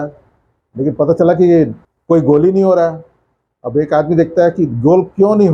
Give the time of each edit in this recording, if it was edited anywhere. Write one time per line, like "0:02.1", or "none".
0:01.9